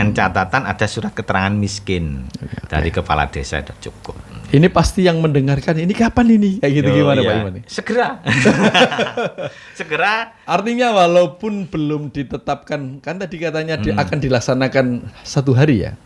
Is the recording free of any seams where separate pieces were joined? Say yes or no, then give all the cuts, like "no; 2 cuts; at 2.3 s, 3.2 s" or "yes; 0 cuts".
yes; 0 cuts